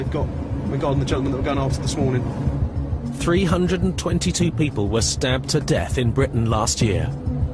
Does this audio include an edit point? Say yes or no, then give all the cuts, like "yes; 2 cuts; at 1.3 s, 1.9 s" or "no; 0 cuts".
yes; 1 cut; at 4.3 s